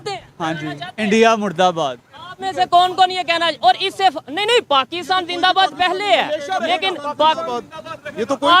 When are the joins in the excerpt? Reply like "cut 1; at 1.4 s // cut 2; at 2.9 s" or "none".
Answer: none